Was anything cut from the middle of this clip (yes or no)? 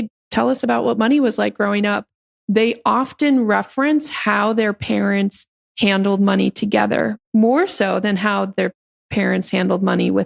no